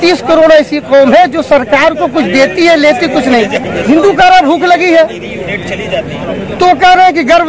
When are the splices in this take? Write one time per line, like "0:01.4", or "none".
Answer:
0:03.6